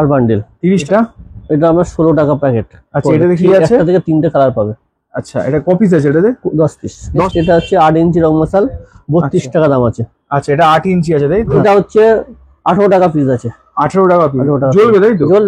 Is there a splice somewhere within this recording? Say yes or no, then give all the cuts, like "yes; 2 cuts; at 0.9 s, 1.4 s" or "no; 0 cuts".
yes; 3 cuts; at 0.8 s, 7.3 s, 11.6 s